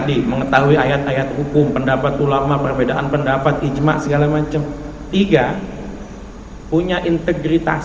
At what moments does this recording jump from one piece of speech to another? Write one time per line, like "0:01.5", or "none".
none